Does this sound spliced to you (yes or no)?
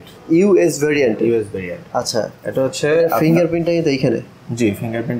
no